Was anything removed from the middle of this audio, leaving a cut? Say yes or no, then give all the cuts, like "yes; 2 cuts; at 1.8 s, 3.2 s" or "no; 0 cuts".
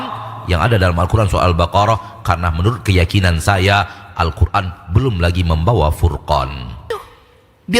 yes; 1 cut; at 6.9 s